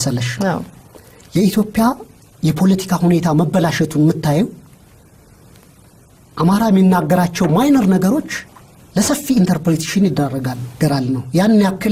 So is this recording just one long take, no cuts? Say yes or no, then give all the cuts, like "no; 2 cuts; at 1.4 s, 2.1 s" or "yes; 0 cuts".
no; 1 cut; at 10.8 s